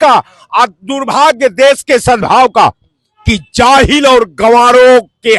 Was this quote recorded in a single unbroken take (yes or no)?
yes